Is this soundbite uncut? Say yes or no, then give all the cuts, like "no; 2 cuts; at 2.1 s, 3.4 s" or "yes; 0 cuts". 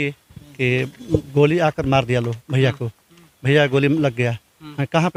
yes; 0 cuts